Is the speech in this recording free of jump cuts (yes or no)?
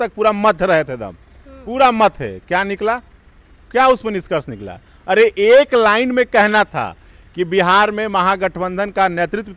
yes